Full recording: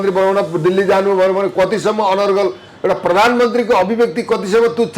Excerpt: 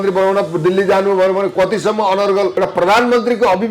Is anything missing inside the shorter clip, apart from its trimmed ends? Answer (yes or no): yes